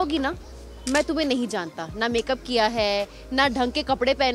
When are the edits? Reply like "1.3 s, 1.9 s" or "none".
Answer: none